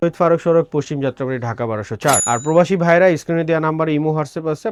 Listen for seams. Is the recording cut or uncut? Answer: uncut